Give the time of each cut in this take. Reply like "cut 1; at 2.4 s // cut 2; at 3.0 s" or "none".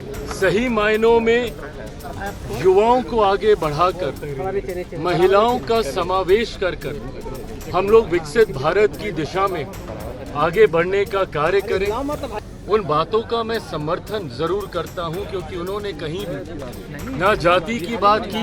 cut 1; at 12.3 s